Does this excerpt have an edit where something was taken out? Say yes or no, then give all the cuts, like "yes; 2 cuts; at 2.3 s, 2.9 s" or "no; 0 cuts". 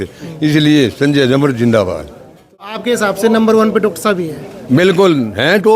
yes; 1 cut; at 2.8 s